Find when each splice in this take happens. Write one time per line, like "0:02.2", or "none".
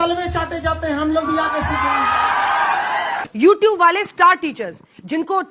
0:03.2